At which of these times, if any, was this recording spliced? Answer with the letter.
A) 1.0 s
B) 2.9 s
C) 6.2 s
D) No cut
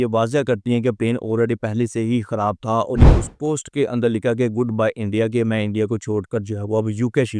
B